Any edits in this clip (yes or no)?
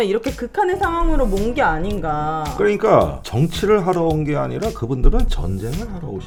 no